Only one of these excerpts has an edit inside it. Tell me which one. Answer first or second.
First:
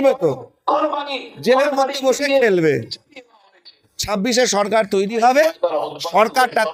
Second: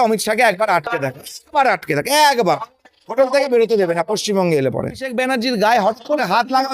second